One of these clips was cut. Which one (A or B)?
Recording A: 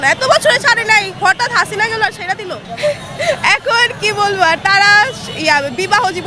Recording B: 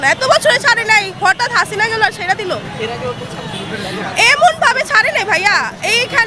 A